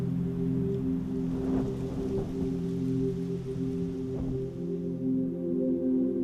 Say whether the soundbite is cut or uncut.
cut